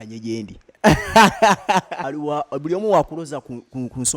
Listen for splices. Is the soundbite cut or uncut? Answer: cut